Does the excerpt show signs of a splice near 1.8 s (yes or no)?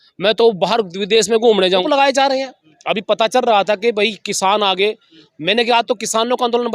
yes